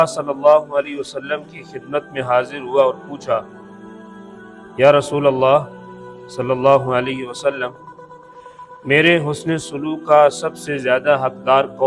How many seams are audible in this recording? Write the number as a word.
zero